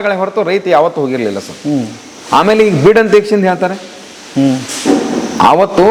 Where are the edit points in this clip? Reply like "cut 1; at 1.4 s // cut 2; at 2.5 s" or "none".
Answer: none